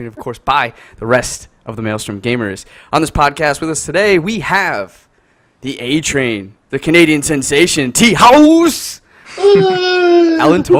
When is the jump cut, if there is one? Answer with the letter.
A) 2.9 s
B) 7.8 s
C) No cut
C